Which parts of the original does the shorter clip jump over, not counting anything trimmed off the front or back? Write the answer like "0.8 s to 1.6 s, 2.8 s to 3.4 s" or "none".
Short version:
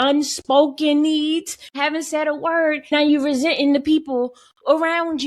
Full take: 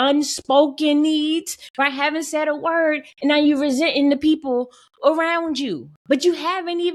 1.7 s to 1.9 s, 3.1 s to 3.3 s